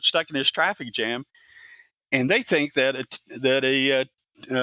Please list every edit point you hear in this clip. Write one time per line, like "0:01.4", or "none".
none